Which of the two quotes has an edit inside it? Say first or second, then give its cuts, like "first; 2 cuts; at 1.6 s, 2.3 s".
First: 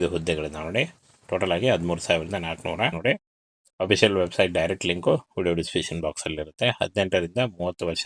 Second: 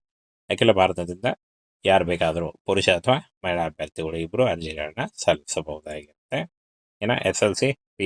first; 1 cut; at 2.9 s